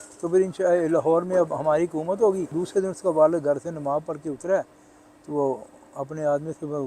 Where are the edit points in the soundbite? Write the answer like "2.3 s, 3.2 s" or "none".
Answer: 2.5 s